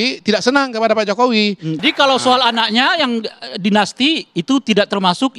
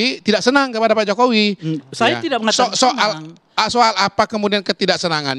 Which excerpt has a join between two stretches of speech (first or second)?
first